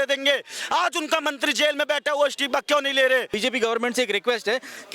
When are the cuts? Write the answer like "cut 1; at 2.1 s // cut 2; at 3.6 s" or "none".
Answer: cut 1; at 3.3 s